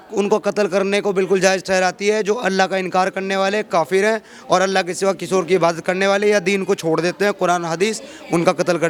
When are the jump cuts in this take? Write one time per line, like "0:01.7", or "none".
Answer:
none